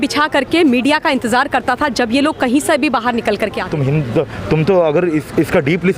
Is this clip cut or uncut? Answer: cut